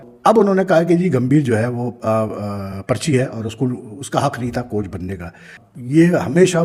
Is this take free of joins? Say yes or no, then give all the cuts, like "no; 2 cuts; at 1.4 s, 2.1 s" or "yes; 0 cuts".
yes; 0 cuts